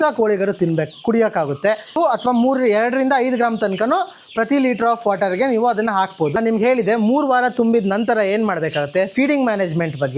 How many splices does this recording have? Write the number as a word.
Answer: two